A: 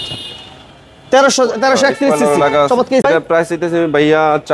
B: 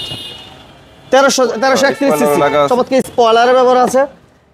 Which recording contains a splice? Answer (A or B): A